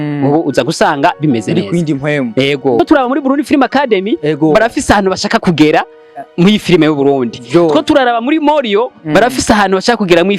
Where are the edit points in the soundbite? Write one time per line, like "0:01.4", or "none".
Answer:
0:02.8

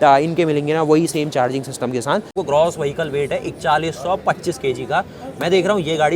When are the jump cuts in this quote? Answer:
0:02.4

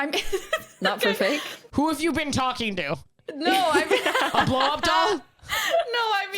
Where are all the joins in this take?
0:01.7

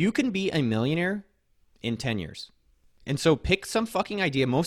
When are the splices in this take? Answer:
0:02.9

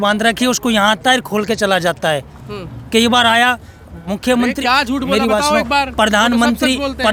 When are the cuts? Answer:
none

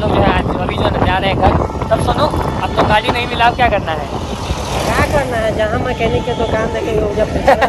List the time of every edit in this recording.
none

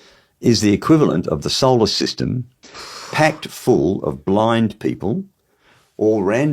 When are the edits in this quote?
0:02.6

